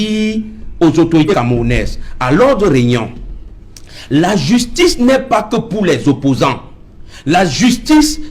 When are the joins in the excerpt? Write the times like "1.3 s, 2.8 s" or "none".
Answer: 1.3 s